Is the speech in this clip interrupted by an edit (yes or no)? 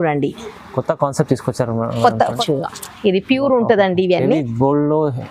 yes